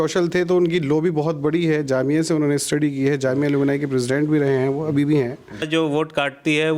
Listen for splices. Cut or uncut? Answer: cut